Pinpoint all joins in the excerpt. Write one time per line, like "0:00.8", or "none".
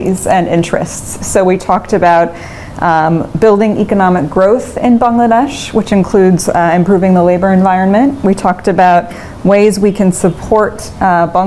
none